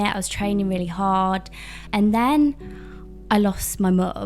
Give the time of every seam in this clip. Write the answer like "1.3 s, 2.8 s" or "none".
1.9 s